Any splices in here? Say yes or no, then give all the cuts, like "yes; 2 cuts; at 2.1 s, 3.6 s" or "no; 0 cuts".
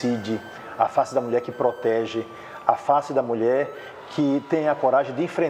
no; 0 cuts